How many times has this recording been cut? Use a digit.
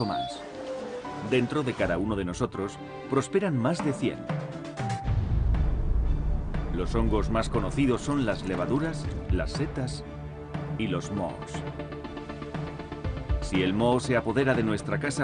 1